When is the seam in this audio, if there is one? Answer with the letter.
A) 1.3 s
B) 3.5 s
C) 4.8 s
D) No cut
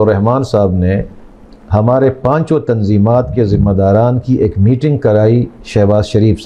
D